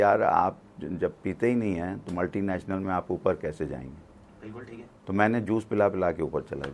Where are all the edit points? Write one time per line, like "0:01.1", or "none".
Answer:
none